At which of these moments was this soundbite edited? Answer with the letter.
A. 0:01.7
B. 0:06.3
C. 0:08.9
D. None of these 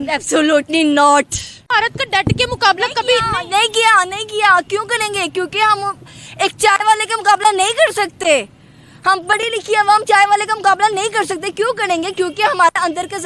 A